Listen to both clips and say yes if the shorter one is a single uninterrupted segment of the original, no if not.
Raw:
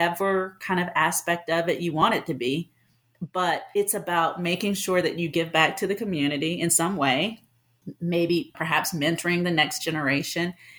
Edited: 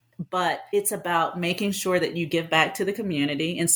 yes